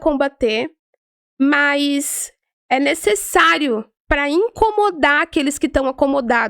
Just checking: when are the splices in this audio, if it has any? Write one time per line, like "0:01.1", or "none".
none

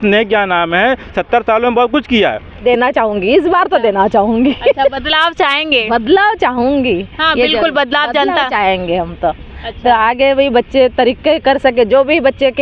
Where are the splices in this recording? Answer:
0:02.6

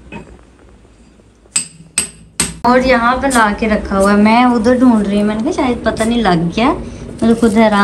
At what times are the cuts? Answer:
0:02.6

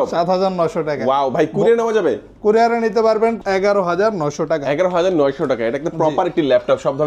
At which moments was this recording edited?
0:03.4

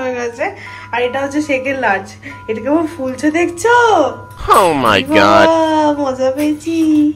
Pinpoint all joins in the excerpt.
none

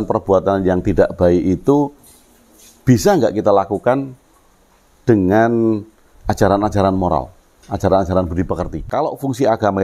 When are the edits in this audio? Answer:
0:08.8

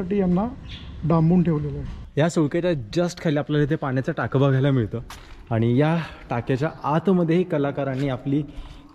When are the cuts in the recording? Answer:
0:02.0

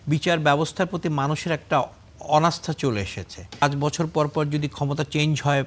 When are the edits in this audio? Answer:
0:03.6

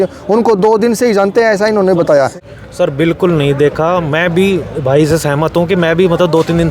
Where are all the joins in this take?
0:02.4

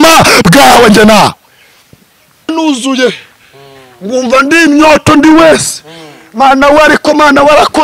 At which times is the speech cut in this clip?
0:02.5

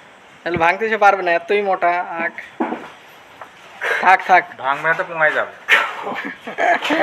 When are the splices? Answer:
none

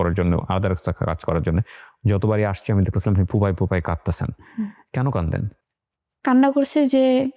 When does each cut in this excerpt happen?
none

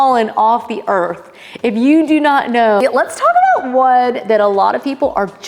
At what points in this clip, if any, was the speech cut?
0:02.8

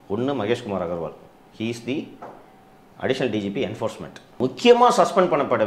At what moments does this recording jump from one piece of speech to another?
0:04.4

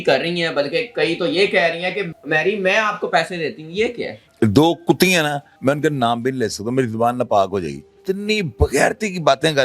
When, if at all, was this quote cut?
0:02.1
0:05.5
0:07.9

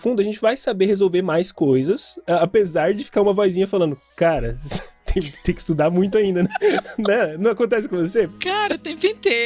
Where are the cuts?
0:08.3

